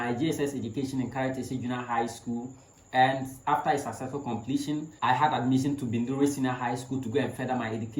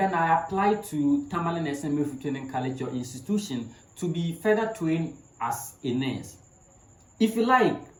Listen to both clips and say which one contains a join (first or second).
first